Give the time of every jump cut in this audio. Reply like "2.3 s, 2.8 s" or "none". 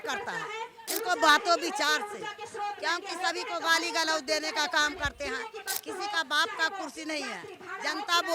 none